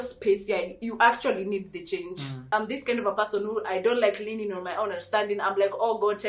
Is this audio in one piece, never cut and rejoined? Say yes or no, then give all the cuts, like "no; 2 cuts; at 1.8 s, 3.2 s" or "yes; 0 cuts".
no; 1 cut; at 2.4 s